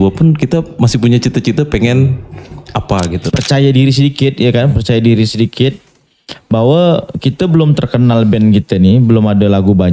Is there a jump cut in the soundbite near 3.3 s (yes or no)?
yes